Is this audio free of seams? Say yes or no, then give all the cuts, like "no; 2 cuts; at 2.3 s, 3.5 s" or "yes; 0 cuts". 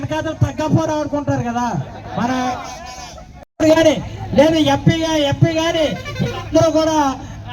no; 1 cut; at 3.5 s